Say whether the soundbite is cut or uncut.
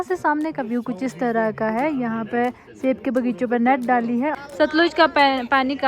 cut